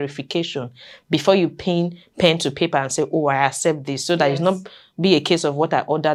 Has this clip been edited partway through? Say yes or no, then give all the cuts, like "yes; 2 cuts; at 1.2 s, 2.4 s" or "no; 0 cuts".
no; 0 cuts